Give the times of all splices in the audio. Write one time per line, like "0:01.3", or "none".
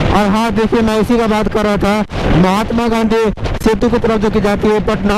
0:02.1